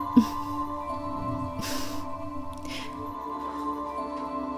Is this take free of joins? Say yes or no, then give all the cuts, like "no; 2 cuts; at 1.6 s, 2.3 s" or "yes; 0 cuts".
no; 1 cut; at 3.1 s